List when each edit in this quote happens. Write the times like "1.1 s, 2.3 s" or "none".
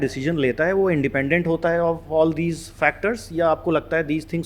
none